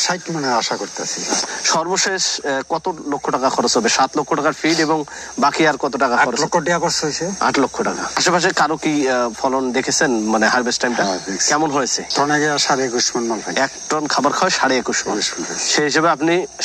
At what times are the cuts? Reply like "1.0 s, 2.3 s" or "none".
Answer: 1.4 s